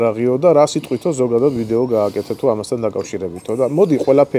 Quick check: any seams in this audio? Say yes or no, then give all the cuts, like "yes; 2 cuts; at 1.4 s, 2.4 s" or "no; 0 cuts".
no; 0 cuts